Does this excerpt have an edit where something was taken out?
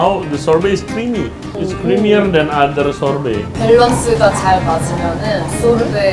yes; 2 cuts; at 1.5 s, 3.5 s

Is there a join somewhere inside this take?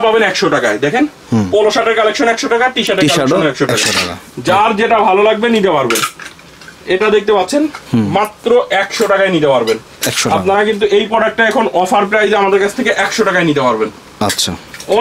no; 0 cuts

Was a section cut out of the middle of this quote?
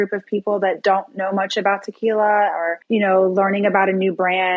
yes; 1 cut; at 2.8 s

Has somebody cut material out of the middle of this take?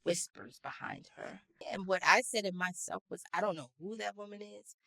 yes; 1 cut; at 1.6 s

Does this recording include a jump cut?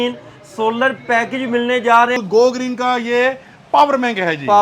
yes; 1 cut; at 2.2 s

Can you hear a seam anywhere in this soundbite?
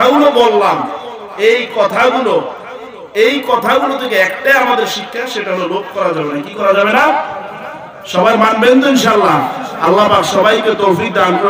no; 0 cuts

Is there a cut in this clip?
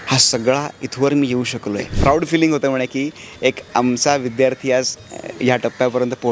yes; 1 cut; at 1.9 s

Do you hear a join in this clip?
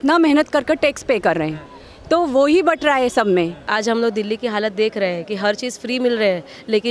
yes; 1 cut; at 3.6 s

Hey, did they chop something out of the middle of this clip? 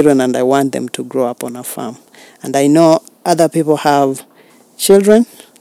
no; 0 cuts

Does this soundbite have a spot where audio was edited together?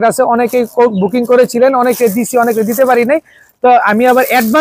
no; 0 cuts

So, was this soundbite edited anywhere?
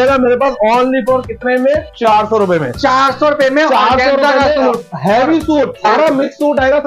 no; 0 cuts

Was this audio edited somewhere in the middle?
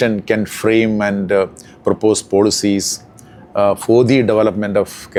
no; 0 cuts

